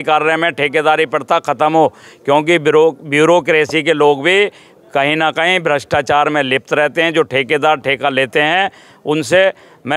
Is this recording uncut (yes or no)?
yes